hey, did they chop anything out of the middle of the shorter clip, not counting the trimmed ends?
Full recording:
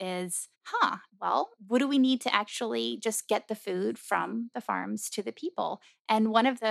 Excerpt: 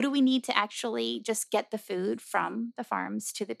no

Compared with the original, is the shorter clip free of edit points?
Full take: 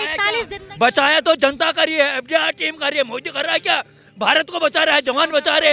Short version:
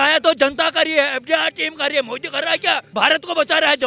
no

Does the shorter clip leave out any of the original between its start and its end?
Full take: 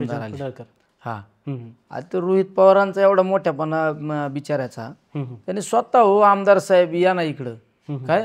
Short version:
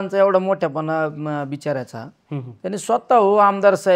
no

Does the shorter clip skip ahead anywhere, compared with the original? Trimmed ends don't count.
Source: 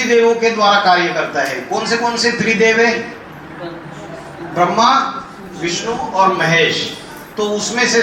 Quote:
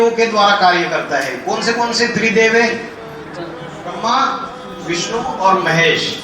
yes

